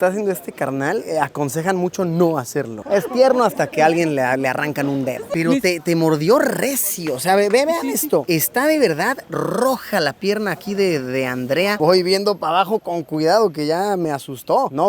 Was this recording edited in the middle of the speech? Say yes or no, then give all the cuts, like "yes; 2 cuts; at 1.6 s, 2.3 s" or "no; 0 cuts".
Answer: yes; 3 cuts; at 2.7 s, 5.3 s, 11.8 s